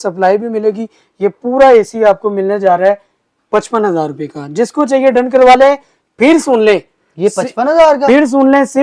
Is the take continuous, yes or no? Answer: yes